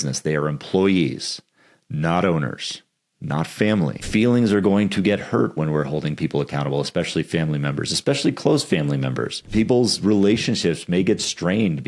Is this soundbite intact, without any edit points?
no; 2 cuts; at 4.0 s, 9.4 s

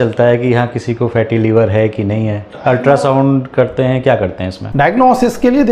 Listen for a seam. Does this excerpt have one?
no; 0 cuts

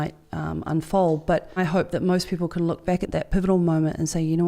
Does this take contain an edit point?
yes; 2 cuts; at 1.6 s, 3.1 s

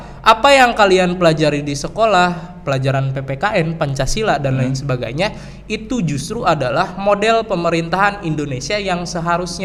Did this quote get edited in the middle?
no; 0 cuts

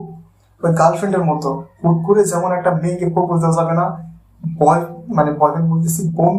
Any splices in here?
no; 0 cuts

